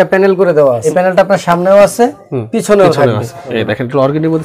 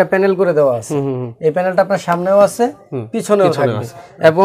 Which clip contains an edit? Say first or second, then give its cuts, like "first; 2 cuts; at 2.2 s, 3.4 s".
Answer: first; 2 cuts; at 0.8 s, 3.4 s